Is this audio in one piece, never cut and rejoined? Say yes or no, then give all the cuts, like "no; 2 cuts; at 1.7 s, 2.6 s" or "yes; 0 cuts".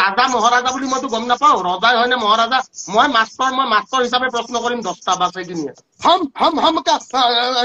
no; 1 cut; at 5.9 s